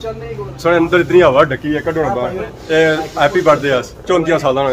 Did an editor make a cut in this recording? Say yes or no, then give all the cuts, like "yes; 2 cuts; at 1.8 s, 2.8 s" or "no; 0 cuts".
yes; 1 cut; at 2.4 s